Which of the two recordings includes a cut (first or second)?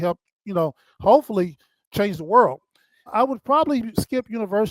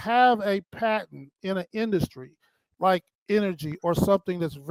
first